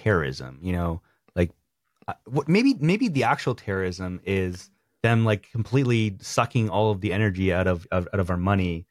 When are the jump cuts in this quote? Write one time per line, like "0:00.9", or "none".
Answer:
none